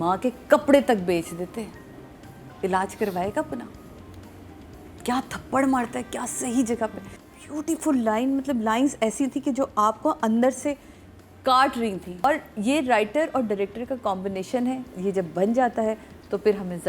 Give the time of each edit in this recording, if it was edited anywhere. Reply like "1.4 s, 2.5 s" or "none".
7.1 s, 12.2 s